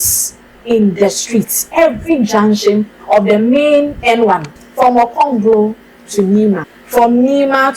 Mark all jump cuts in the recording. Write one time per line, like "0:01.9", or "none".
0:04.6
0:06.7